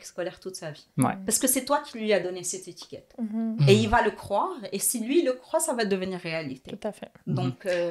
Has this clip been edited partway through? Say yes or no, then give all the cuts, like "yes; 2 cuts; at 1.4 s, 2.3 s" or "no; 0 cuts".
no; 0 cuts